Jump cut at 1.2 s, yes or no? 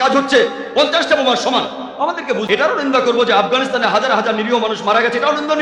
no